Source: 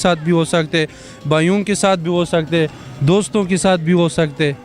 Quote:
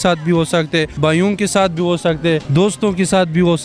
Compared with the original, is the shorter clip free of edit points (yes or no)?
no